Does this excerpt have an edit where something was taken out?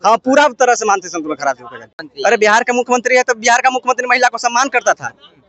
yes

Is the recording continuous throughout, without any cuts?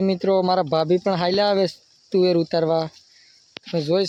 yes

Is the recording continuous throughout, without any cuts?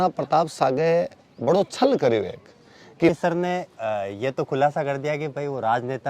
no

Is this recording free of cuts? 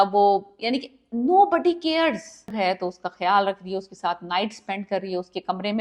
no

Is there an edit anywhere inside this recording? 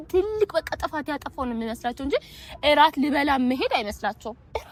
no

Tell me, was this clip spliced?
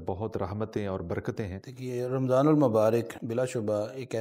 yes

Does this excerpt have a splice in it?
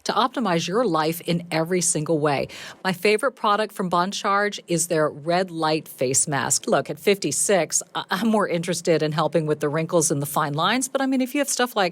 yes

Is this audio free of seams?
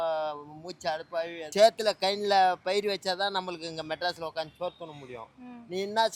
no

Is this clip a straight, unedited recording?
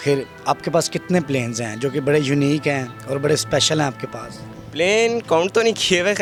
yes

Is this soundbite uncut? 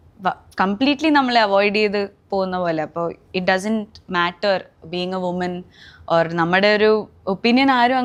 yes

